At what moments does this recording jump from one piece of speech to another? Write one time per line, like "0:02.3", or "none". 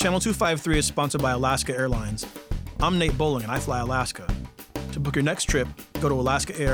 none